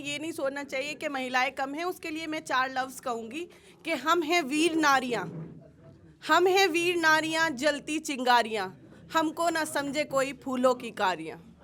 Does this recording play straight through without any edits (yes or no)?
yes